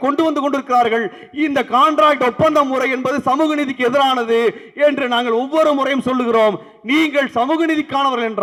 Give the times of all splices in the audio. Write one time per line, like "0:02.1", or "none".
none